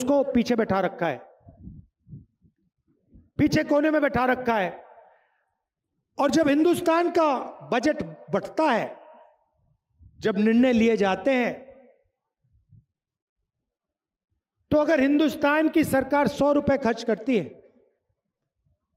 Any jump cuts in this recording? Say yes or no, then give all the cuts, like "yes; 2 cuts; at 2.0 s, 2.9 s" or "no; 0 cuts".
no; 0 cuts